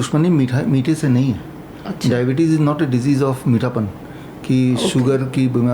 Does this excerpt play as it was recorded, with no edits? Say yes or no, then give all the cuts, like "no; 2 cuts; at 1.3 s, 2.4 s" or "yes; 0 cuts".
yes; 0 cuts